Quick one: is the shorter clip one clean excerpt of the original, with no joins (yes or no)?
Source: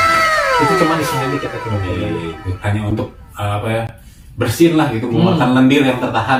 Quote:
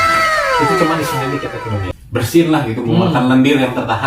no